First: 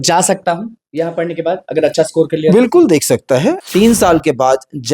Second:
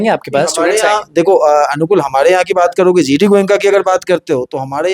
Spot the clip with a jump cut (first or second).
first